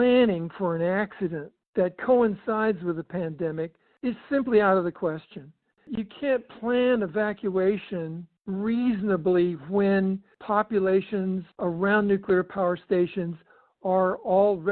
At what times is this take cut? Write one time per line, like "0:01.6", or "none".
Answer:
0:05.8
0:10.3
0:11.5